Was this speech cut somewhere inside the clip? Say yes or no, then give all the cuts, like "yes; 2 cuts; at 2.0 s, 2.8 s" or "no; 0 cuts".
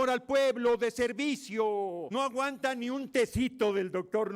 yes; 1 cut; at 2.0 s